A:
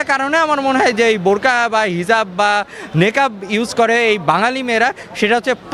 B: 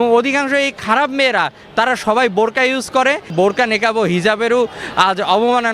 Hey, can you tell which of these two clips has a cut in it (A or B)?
B